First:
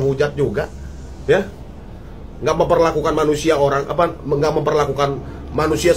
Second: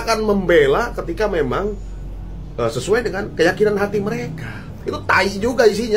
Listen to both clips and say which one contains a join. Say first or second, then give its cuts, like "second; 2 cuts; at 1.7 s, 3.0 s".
second; 1 cut; at 4.8 s